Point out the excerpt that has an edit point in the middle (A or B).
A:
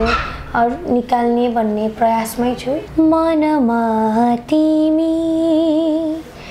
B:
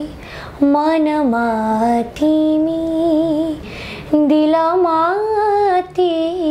A